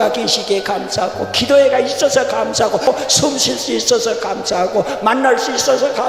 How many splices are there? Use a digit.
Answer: 1